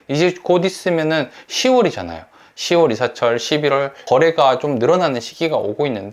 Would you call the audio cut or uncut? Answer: cut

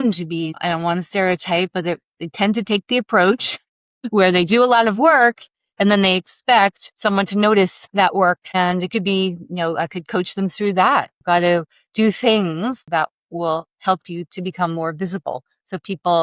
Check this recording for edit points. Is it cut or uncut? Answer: cut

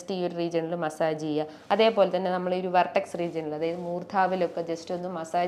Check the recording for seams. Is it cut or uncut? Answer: uncut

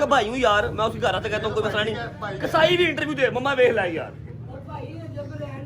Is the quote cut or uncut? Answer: uncut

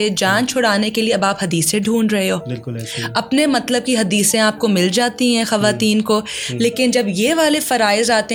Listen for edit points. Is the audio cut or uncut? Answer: uncut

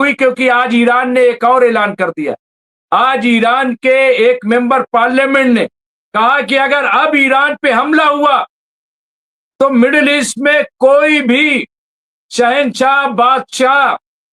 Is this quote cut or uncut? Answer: uncut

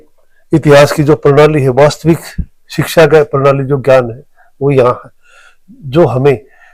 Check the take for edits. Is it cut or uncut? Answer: uncut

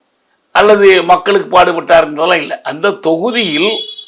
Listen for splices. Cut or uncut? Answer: uncut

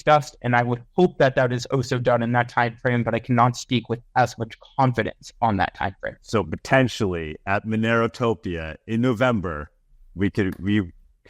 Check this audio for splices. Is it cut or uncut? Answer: cut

